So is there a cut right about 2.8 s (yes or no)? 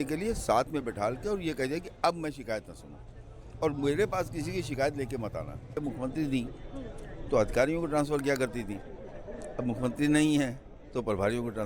no